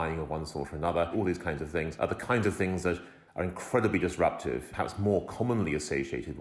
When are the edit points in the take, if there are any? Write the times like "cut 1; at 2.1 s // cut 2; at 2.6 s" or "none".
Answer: cut 1; at 1.4 s // cut 2; at 4.7 s